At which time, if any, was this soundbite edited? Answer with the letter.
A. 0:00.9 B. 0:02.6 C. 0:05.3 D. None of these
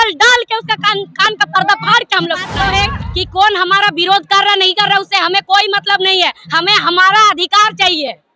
B